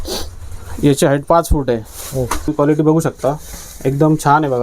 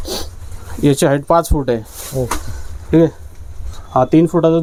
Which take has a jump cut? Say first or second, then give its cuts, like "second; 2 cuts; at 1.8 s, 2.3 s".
first; 1 cut; at 2.5 s